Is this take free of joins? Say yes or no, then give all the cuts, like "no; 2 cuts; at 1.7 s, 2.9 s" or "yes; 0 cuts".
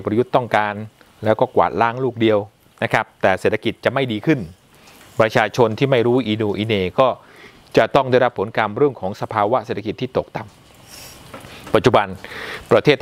yes; 0 cuts